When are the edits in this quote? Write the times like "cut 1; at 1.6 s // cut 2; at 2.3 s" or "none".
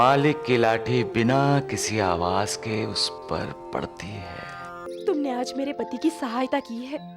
cut 1; at 4.9 s